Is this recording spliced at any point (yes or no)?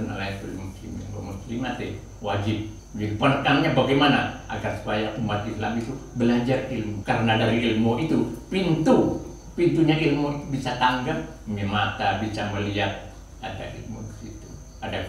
yes